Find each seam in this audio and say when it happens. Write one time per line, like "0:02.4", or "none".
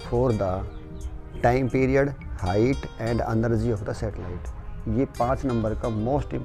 none